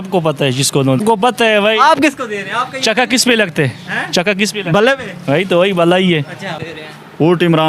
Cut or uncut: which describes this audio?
cut